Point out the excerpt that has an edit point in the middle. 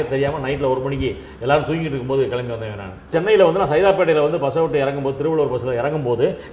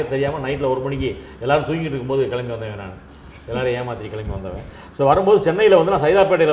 first; 1 cut; at 3.1 s

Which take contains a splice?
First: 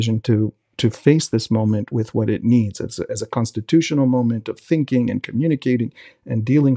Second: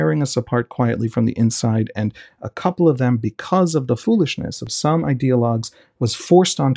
second; 1 cut; at 4.4 s

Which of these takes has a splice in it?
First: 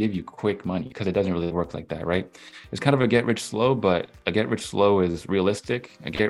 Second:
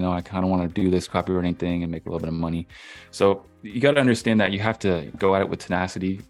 first; 1 cut; at 0.9 s

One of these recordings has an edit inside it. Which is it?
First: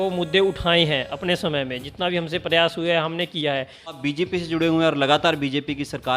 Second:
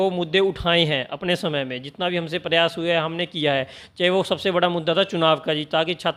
first; 1 cut; at 3.8 s

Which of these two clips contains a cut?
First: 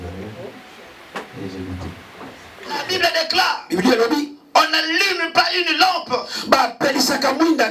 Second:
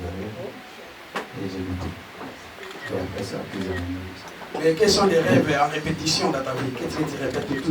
first; 1 cut; at 2.8 s

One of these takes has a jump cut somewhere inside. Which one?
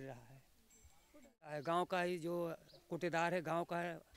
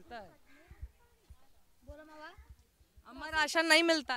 first; 1 cut; at 1.5 s

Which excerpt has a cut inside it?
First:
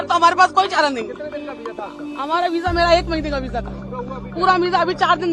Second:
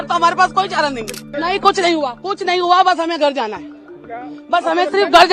second; 1 cut; at 1.2 s

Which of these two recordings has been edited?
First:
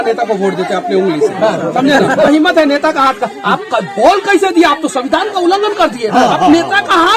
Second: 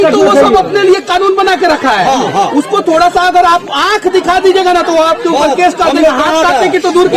first; 1 cut; at 2.3 s

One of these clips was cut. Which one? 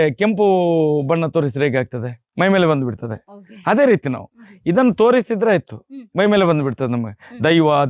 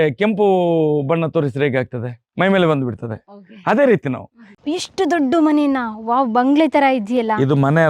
second; 1 cut; at 4.5 s

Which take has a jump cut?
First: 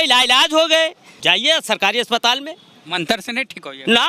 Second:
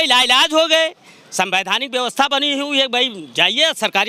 first; 1 cut; at 1.1 s

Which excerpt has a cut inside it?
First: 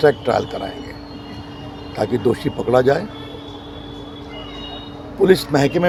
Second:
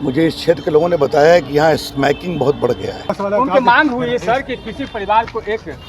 second; 1 cut; at 3.2 s

